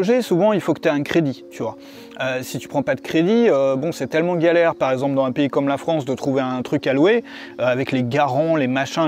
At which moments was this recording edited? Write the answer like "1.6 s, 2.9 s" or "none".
none